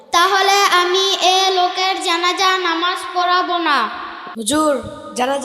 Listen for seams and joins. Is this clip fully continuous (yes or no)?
no